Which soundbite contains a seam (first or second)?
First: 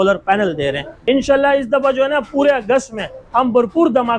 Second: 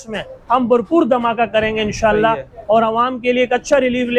first